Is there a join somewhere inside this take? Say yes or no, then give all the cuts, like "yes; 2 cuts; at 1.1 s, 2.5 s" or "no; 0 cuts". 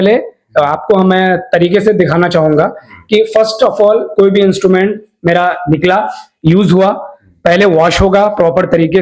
no; 0 cuts